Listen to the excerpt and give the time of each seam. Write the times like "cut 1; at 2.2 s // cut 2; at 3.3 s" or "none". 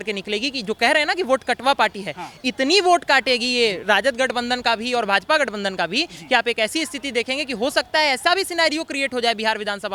none